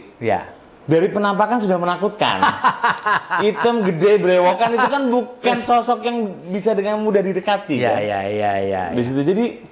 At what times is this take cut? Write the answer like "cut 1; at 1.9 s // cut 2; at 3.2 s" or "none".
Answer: none